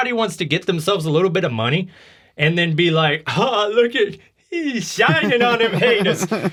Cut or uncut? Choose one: uncut